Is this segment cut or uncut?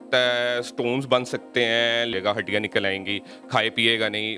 cut